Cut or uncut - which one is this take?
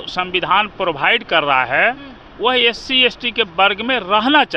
uncut